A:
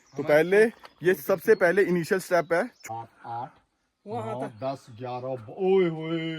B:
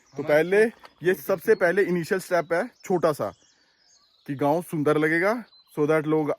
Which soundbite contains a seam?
A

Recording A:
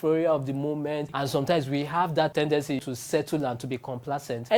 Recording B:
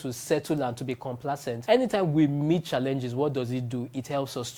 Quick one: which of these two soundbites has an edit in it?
A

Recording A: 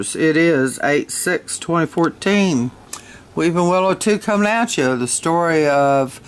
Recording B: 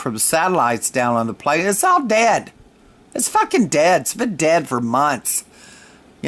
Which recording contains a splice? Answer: B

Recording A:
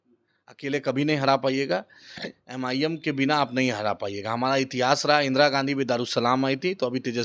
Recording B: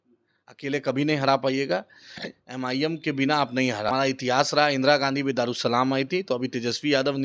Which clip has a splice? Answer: B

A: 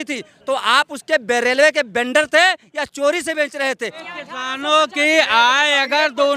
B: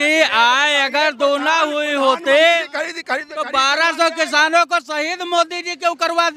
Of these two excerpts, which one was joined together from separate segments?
A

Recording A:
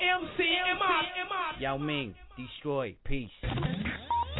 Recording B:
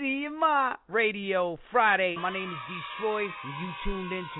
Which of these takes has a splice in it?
B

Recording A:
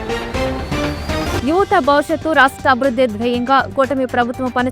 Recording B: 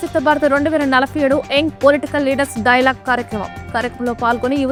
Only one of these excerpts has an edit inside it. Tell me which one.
A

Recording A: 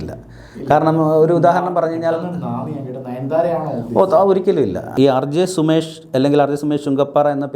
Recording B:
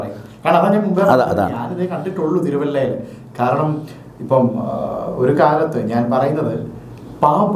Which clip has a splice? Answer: A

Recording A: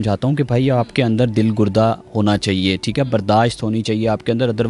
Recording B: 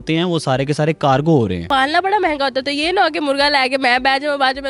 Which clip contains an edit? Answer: B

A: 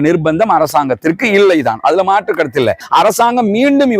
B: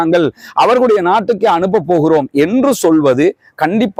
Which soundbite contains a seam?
A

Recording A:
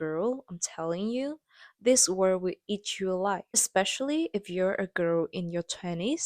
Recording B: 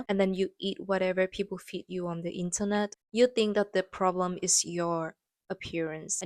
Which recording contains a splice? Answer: A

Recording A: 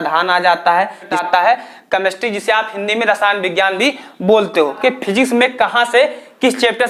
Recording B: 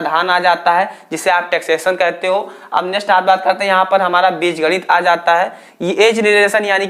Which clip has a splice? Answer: A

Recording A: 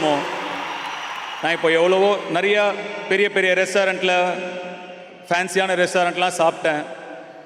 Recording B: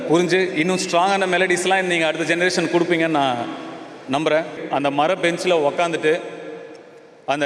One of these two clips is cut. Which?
B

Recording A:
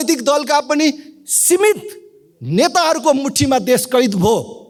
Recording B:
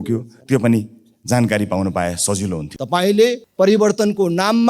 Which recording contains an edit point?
B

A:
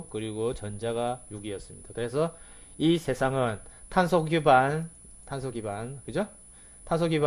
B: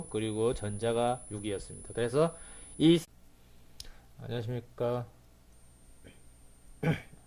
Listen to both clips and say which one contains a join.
A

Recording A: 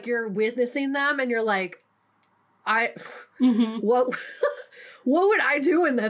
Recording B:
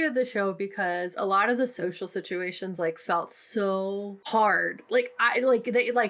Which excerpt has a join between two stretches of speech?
B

